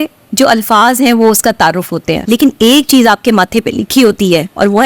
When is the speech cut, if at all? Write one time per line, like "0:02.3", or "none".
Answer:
0:02.1